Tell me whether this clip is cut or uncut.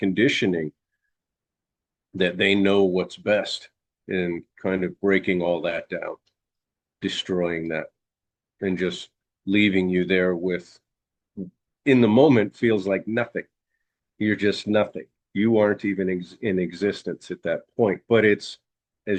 uncut